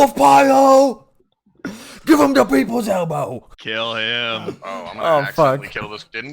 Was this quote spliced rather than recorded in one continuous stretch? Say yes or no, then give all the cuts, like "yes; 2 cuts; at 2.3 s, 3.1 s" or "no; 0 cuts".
yes; 2 cuts; at 1.1 s, 3.5 s